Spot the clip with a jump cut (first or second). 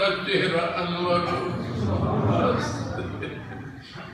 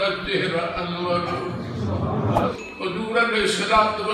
second